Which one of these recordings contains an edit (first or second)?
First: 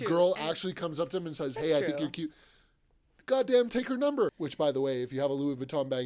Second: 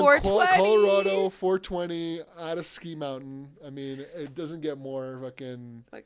first